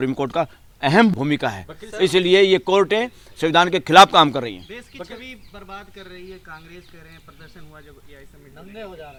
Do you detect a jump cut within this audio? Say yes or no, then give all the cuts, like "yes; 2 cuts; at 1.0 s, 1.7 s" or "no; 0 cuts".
no; 0 cuts